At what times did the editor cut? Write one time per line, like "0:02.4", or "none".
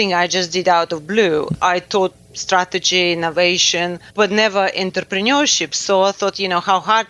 0:01.5
0:04.0